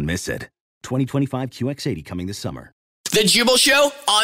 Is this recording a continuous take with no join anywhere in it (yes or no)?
no